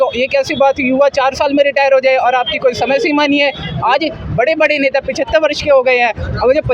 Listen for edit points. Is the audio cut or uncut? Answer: uncut